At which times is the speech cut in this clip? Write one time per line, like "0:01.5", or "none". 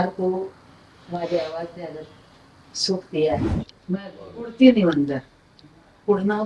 0:03.5